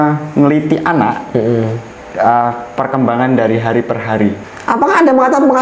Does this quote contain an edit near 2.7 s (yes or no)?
no